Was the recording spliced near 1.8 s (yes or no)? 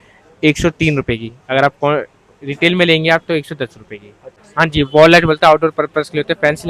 no